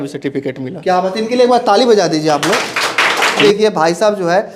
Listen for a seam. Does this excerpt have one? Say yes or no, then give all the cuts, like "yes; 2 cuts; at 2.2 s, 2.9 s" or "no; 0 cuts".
no; 0 cuts